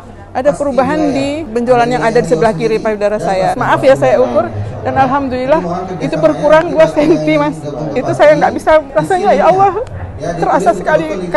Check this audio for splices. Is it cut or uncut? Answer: cut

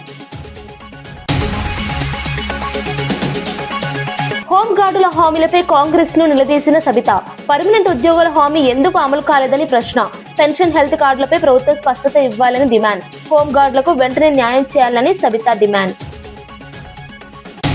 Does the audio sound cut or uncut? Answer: uncut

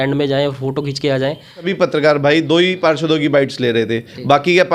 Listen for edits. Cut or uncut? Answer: cut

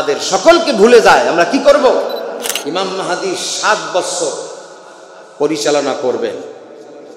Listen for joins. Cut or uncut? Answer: cut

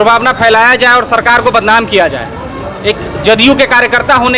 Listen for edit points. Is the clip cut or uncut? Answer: uncut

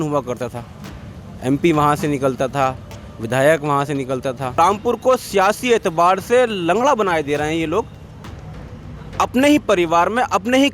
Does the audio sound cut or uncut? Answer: cut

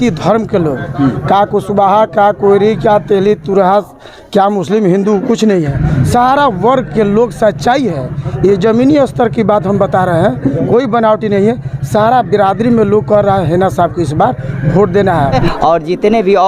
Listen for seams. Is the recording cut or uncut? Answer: cut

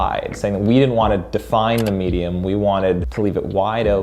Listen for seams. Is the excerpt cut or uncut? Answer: cut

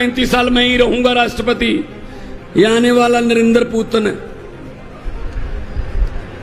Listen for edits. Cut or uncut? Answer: uncut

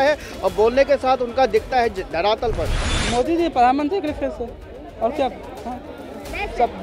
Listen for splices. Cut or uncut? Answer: cut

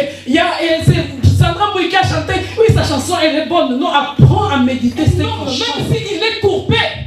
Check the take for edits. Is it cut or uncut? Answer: cut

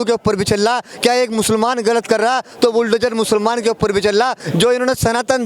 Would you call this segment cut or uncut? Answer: cut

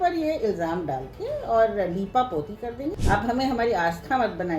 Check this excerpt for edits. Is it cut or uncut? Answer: cut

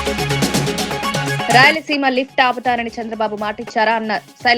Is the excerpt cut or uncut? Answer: cut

